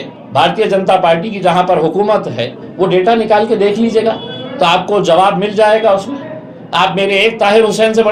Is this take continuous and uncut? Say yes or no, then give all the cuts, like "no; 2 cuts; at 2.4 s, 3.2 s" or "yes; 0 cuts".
yes; 0 cuts